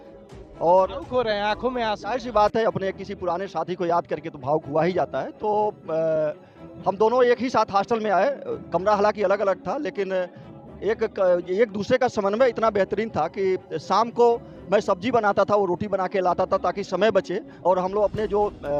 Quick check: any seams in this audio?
no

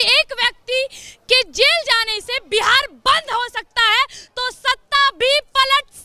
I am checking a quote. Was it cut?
no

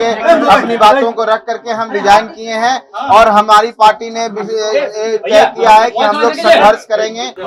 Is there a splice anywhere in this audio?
no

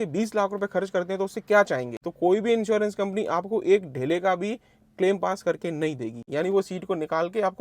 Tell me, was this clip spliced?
yes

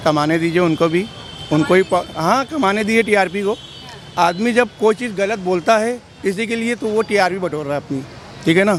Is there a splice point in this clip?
no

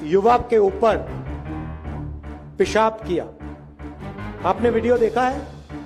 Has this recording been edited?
no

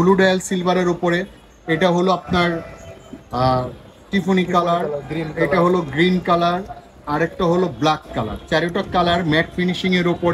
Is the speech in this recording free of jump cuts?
yes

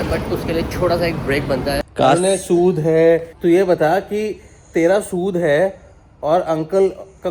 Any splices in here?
yes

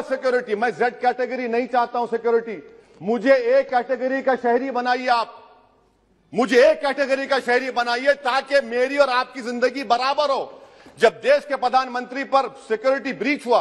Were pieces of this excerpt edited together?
no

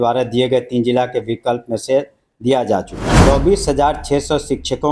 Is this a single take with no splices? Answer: no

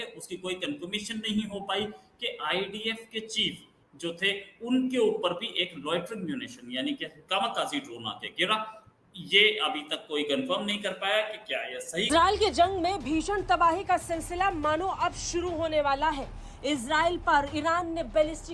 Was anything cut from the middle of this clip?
yes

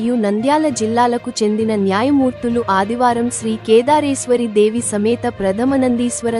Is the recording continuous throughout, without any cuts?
yes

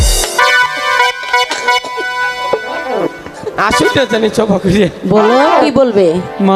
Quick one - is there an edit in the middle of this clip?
yes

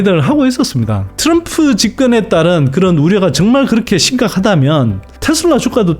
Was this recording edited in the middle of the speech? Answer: yes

